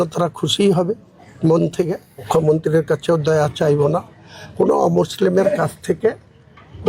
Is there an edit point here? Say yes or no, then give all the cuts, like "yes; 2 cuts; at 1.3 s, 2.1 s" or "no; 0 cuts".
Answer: yes; 1 cut; at 2.3 s